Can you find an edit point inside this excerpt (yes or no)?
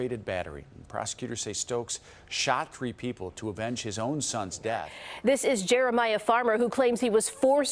yes